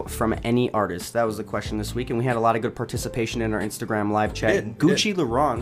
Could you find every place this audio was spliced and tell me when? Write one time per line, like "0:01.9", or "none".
none